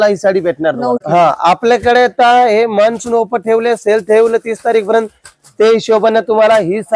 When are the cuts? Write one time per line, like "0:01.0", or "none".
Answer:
0:01.0